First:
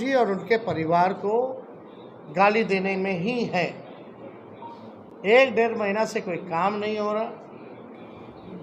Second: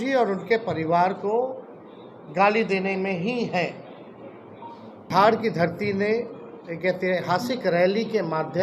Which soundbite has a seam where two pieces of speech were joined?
second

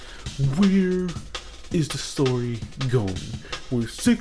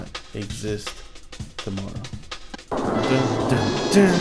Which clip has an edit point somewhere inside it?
second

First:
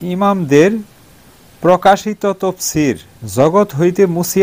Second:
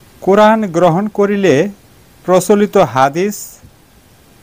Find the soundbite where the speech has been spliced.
first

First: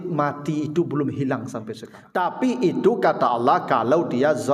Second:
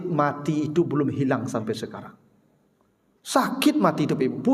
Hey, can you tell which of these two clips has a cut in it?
first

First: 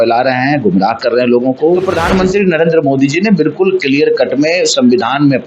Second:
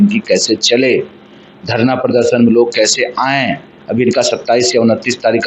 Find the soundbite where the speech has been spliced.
first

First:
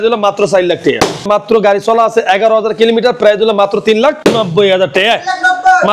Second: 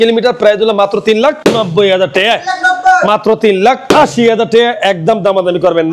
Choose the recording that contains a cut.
first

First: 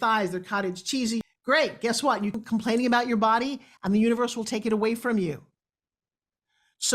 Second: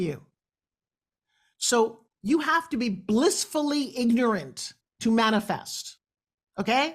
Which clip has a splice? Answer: first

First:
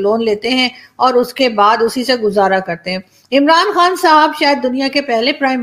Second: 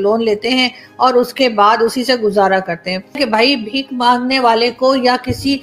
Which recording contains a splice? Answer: second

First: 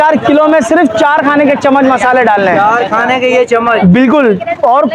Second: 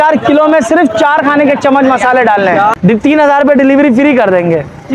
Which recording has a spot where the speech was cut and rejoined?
second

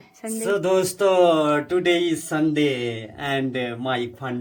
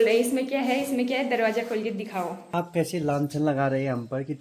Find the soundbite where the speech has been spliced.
second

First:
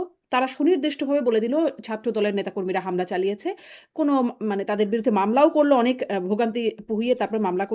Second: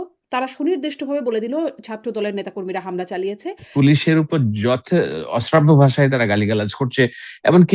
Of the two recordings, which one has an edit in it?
second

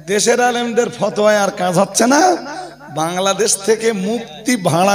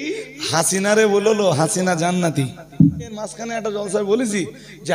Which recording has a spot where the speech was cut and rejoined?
second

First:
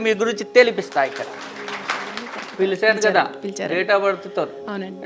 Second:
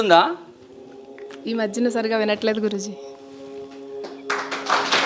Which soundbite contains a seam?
first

